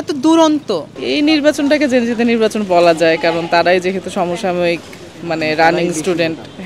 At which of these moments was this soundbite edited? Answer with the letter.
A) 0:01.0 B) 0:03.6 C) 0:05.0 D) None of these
A